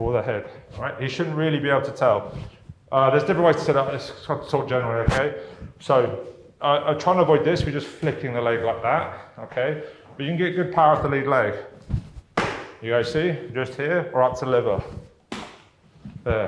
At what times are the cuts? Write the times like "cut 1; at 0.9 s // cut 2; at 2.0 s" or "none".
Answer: none